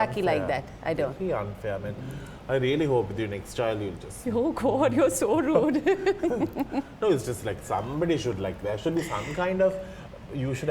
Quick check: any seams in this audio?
no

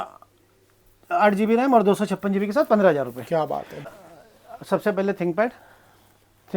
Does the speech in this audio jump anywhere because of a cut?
yes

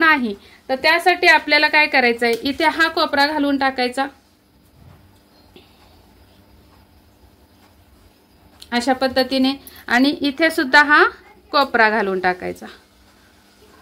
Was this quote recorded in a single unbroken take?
yes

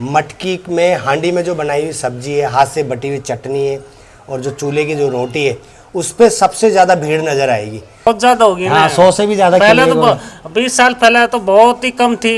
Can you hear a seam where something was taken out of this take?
yes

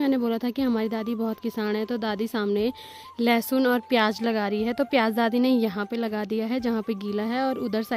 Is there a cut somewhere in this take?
no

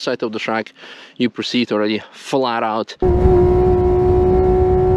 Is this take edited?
no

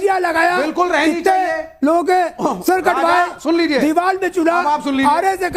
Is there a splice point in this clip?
no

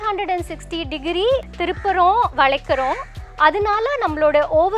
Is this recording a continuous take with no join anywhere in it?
no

